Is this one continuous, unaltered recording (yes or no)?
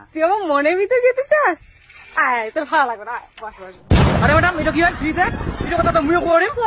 no